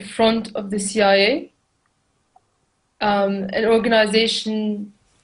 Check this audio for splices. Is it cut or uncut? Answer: cut